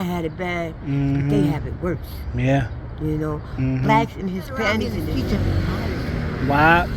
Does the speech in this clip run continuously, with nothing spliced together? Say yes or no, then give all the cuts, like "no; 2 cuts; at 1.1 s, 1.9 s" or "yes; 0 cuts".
no; 1 cut; at 5.0 s